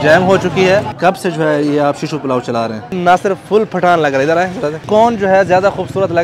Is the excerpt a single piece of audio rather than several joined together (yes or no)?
no